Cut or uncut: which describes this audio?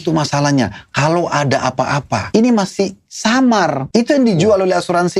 cut